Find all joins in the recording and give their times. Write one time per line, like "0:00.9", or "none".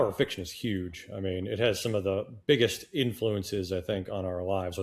none